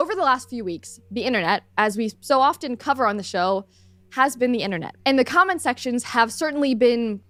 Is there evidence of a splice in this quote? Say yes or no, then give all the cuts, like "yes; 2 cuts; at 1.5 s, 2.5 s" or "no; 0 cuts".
no; 0 cuts